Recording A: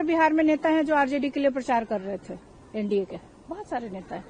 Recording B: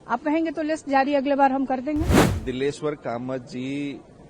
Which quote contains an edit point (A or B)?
B